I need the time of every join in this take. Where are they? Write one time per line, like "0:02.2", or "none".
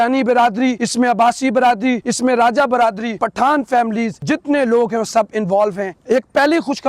0:00.8
0:02.1
0:03.1
0:04.2
0:05.9